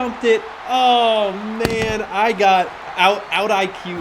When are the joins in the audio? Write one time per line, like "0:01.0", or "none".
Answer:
0:02.8